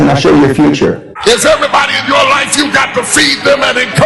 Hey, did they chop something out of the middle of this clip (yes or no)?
yes